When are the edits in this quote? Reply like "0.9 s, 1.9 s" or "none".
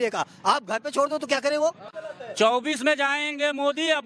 1.9 s